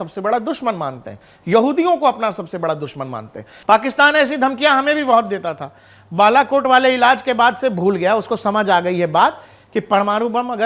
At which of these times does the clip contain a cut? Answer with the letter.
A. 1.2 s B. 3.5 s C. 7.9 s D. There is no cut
B